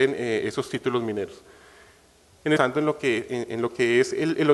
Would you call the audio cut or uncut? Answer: uncut